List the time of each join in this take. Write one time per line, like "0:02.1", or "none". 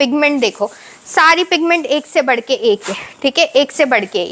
none